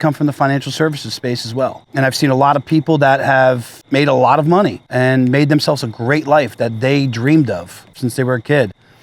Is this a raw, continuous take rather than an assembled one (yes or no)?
no